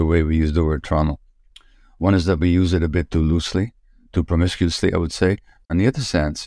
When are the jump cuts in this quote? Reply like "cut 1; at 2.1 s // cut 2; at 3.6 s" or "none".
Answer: cut 1; at 5.6 s